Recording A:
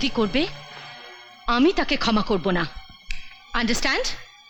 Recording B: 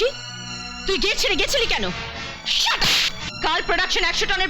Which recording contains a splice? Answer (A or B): B